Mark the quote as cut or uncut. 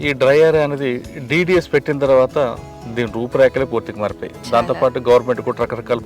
uncut